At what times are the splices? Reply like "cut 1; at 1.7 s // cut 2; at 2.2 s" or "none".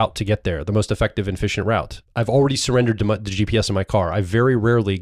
cut 1; at 2.0 s